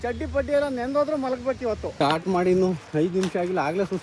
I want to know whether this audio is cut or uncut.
cut